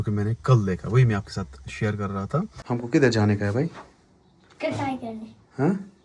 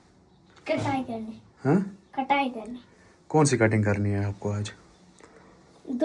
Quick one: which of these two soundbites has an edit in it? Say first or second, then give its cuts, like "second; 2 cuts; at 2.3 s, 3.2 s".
first; 1 cut; at 2.6 s